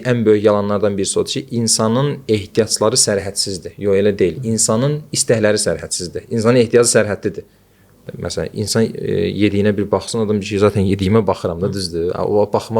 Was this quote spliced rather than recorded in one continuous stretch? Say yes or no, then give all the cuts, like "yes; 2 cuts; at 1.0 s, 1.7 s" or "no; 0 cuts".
yes; 1 cut; at 8.1 s